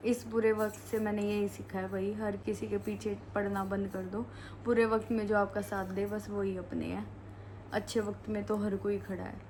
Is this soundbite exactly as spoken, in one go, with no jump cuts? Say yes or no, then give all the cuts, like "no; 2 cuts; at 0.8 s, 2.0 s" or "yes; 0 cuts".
yes; 0 cuts